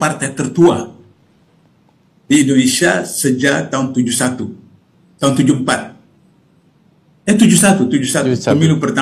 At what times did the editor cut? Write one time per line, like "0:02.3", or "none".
none